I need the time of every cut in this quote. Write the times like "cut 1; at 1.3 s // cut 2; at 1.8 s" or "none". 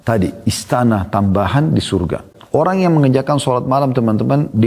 cut 1; at 2.6 s